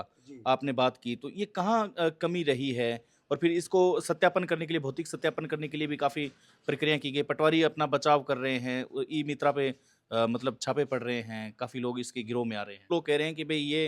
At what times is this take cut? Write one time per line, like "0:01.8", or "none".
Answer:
0:12.9